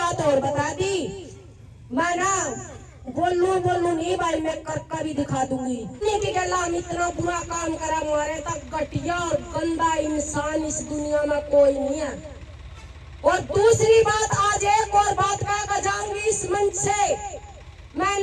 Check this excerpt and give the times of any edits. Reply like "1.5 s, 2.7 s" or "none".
6.0 s

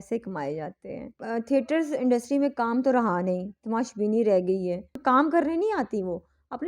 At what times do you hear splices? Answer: 1.2 s, 5.0 s

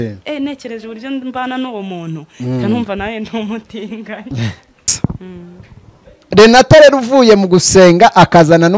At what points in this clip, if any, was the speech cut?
4.9 s

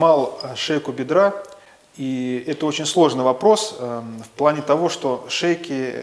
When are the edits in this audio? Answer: none

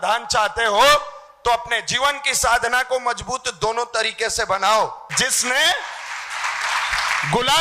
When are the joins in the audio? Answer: 5.1 s

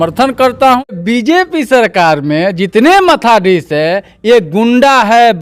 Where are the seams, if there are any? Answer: 0.9 s

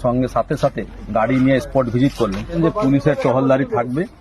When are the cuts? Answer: 2.5 s

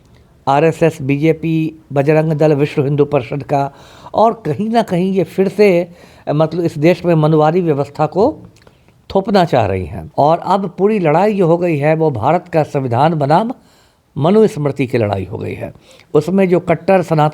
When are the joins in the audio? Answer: 10.0 s

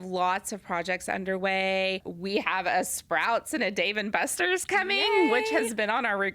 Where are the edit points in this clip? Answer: 2.1 s

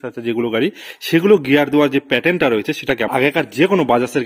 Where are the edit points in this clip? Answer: 3.0 s

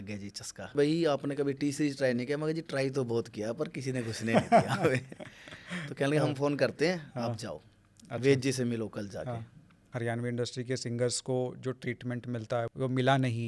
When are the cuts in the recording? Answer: 0.7 s, 9.9 s, 12.7 s

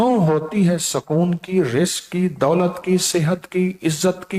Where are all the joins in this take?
none

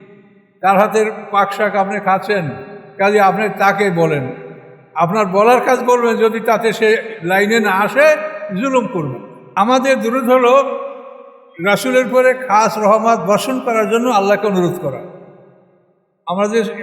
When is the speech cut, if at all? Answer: 9.5 s

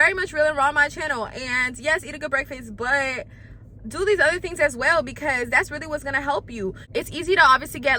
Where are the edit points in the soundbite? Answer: 6.8 s

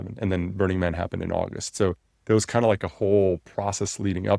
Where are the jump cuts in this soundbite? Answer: none

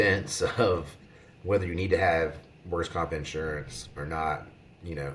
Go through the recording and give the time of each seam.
none

